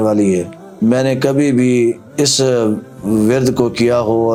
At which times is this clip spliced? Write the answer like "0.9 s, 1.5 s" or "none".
none